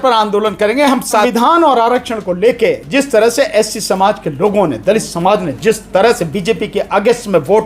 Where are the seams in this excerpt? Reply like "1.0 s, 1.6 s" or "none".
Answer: 1.3 s